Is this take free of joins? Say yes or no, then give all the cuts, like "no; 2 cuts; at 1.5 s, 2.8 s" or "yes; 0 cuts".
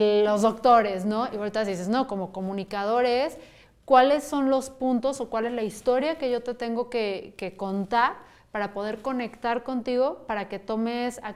yes; 0 cuts